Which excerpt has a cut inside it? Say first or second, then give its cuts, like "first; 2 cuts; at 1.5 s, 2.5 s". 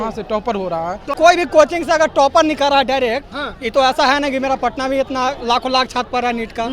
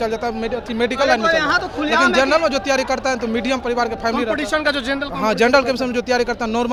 first; 1 cut; at 1.1 s